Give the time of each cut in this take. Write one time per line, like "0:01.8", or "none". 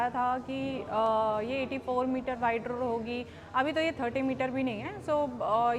none